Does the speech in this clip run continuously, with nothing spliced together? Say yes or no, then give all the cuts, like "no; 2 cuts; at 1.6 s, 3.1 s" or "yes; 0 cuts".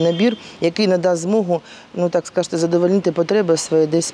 yes; 0 cuts